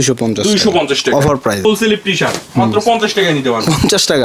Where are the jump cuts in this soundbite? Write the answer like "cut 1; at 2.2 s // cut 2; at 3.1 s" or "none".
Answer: cut 1; at 1.6 s